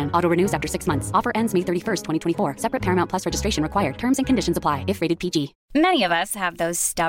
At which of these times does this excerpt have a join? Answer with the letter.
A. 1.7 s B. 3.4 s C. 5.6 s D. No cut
D